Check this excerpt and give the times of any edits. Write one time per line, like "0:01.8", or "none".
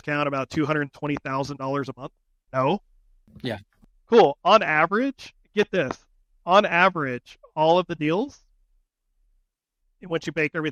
none